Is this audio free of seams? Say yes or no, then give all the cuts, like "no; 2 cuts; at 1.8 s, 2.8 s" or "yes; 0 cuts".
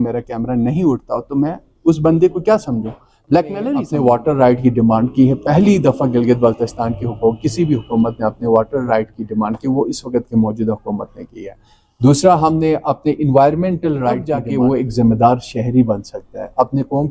no; 2 cuts; at 3.9 s, 14.4 s